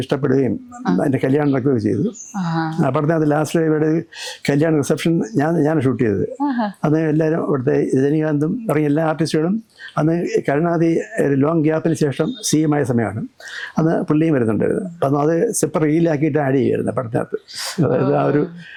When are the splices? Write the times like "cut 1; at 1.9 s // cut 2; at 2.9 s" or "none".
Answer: none